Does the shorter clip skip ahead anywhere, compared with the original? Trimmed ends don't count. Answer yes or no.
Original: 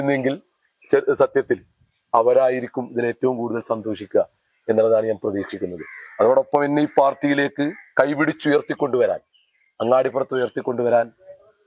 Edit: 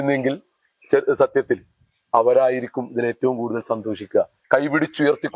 yes